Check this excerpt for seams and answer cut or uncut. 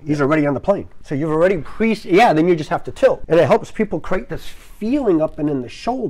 cut